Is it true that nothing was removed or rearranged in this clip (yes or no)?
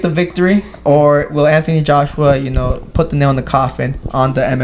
yes